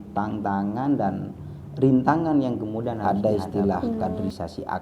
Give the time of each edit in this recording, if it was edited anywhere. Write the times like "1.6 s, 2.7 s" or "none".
3.0 s